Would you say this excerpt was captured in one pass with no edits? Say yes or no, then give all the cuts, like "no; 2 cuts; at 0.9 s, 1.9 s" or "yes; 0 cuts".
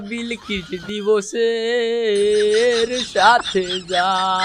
yes; 0 cuts